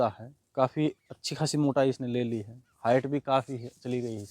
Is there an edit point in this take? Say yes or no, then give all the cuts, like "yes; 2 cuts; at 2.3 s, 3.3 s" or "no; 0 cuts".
no; 0 cuts